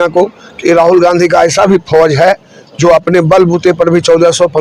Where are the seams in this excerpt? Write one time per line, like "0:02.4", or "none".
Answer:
none

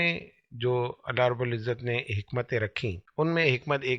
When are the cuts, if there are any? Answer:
0:03.0

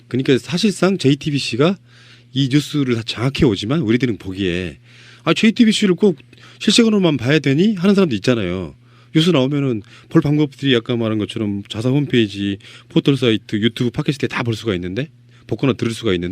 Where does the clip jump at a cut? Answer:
0:03.3

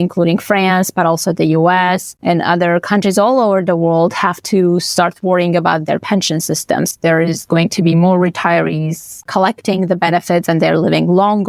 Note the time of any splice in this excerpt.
0:02.1
0:06.9
0:09.2

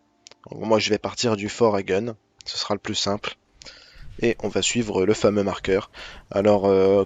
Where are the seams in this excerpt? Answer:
0:01.6

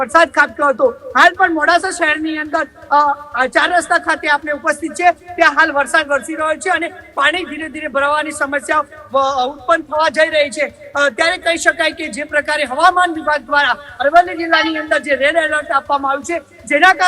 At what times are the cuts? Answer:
none

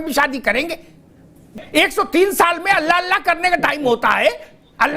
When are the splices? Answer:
0:01.6

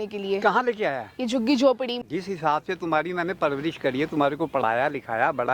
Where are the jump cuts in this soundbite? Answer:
0:02.0

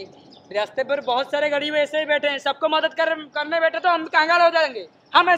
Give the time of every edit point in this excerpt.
none

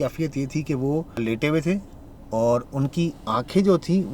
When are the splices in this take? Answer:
0:01.2

